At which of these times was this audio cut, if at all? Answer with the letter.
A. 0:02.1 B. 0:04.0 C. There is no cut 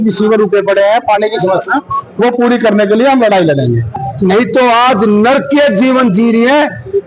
B